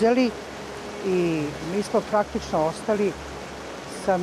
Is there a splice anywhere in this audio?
no; 0 cuts

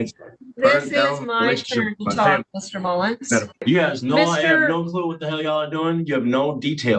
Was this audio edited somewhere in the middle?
yes; 1 cut; at 3.6 s

